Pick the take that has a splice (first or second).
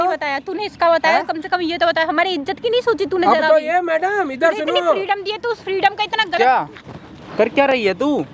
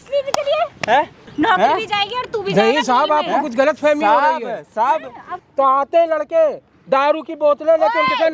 second